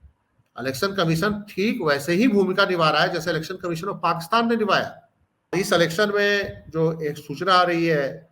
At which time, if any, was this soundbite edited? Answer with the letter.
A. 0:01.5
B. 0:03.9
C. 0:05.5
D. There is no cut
C